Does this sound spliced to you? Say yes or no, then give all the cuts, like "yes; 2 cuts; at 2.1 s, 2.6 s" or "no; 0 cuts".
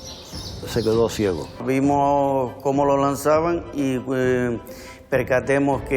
yes; 1 cut; at 1.5 s